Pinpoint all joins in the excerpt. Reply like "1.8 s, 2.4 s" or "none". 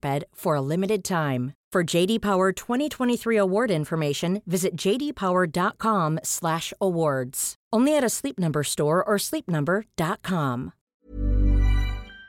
10.8 s

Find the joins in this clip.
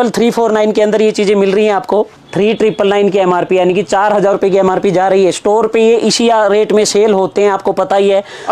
2.2 s

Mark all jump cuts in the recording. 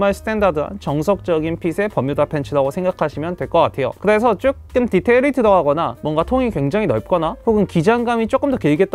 none

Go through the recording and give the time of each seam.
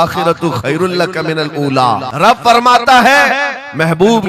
2.1 s

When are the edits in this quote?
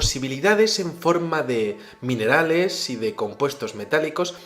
3.2 s

